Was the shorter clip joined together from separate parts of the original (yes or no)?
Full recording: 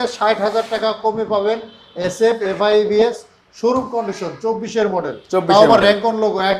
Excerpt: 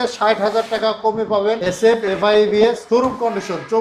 yes